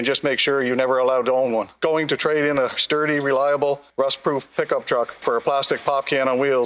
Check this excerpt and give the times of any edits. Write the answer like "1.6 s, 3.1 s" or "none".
1.7 s